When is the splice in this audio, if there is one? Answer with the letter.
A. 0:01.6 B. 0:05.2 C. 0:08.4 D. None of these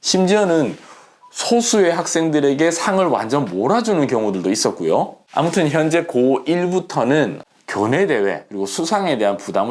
B